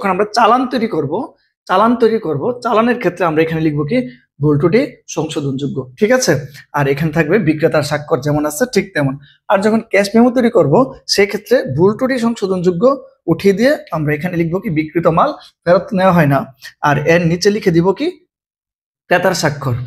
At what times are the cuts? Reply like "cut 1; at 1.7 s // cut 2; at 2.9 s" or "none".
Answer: none